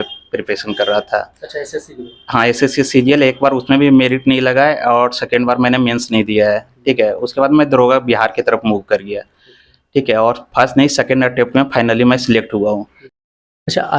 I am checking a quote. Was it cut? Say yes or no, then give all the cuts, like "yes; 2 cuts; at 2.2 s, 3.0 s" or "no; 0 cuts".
no; 0 cuts